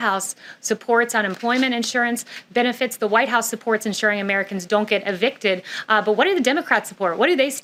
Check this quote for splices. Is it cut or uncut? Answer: uncut